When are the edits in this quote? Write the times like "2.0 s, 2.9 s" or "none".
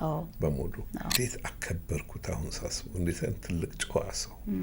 1.1 s